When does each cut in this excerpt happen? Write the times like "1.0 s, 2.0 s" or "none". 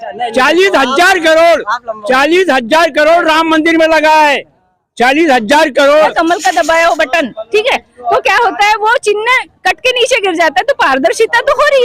6.1 s